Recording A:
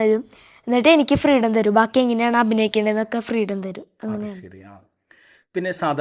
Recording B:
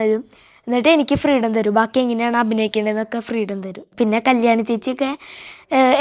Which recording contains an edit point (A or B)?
B